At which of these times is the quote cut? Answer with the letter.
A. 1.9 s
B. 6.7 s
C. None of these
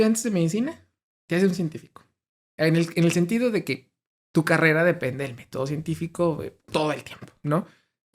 B